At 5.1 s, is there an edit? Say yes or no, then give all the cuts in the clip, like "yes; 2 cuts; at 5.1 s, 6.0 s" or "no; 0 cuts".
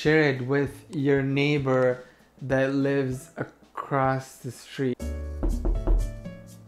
yes; 1 cut; at 5.1 s